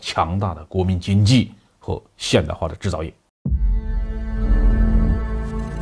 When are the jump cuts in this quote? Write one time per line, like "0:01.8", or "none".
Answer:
0:03.2